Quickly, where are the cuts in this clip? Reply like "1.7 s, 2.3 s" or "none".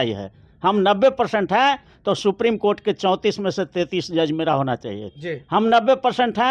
none